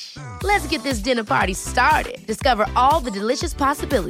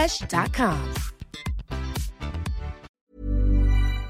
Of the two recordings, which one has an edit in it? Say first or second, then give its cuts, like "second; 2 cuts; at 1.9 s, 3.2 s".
second; 1 cut; at 2.9 s